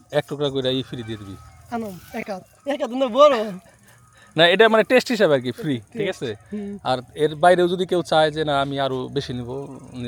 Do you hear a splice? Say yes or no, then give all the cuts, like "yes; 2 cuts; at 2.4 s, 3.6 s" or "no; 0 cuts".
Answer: no; 0 cuts